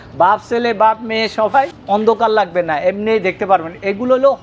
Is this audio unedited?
no; 1 cut; at 1.7 s

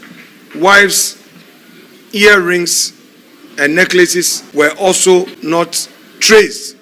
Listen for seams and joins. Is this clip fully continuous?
no; 2 cuts; at 4.4 s, 5.4 s

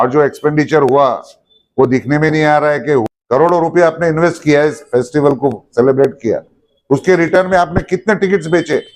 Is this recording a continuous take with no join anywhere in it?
no; 1 cut; at 3.0 s

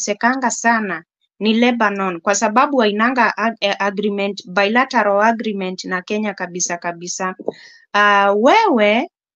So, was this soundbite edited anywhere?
no; 0 cuts

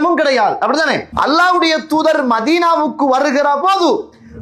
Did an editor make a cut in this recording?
yes; 1 cut; at 1.1 s

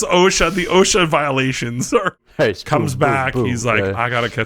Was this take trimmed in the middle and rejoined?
yes; 1 cut; at 2.2 s

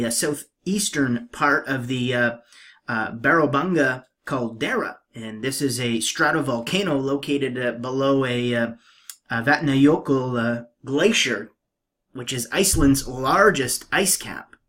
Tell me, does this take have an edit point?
no; 0 cuts

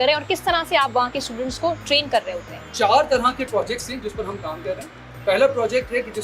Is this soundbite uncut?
yes; 0 cuts

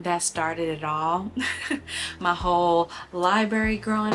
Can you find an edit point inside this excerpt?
no; 0 cuts

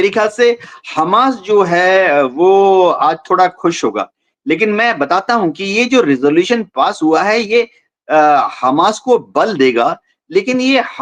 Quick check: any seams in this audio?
no; 0 cuts

